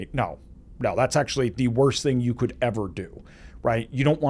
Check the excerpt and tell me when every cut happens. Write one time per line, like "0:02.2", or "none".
none